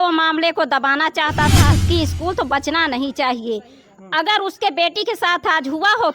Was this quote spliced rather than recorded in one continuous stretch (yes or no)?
yes